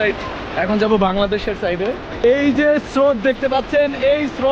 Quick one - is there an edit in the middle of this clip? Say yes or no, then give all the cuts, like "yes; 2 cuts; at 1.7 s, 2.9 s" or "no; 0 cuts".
no; 0 cuts